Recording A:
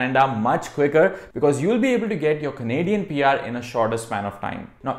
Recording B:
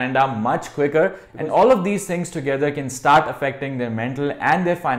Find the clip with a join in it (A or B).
B